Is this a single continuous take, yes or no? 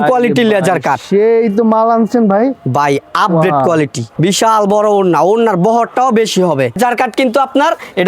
no